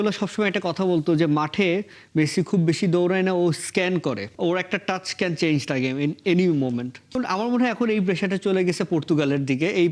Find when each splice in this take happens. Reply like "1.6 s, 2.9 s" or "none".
4.3 s, 7.1 s